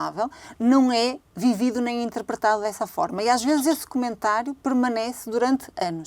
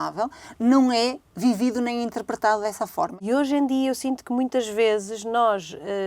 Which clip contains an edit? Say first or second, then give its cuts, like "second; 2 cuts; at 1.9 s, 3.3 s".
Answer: second; 1 cut; at 3.1 s